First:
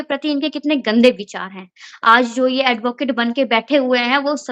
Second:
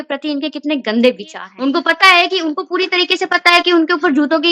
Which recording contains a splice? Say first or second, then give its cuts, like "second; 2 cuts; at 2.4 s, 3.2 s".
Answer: second; 1 cut; at 1.4 s